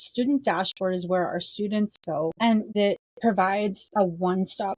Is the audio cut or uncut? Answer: cut